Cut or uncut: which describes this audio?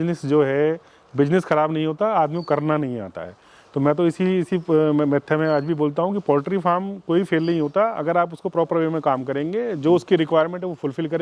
uncut